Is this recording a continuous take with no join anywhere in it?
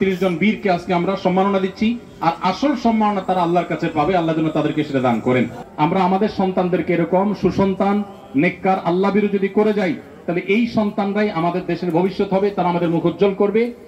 no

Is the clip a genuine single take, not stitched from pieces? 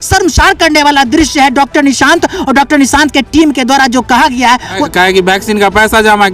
no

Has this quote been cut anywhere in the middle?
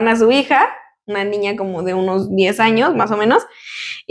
no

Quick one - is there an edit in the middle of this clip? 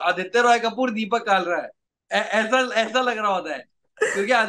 no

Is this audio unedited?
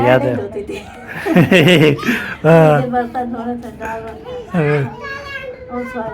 yes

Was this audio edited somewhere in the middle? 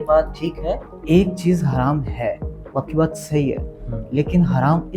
yes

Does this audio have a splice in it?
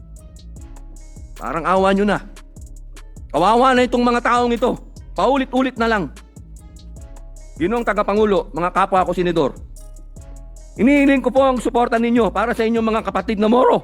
yes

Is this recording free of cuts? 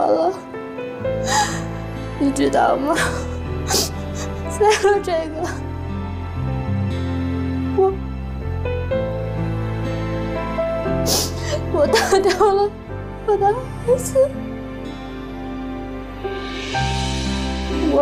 yes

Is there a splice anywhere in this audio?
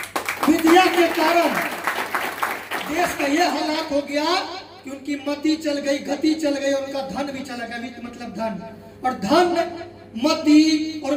no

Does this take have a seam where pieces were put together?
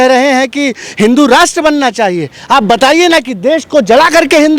no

